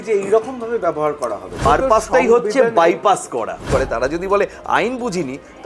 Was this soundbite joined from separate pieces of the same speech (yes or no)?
yes